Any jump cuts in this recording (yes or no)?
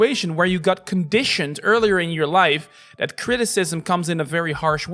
no